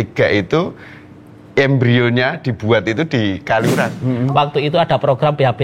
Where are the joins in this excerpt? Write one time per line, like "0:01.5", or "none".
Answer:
0:03.9